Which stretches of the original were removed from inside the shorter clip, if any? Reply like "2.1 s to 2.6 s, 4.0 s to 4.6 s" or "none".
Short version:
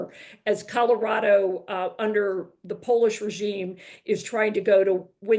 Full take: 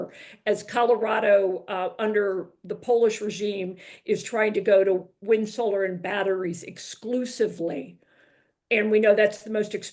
none